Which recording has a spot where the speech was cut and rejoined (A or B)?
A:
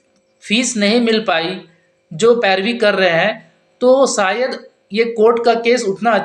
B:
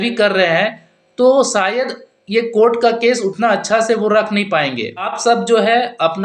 B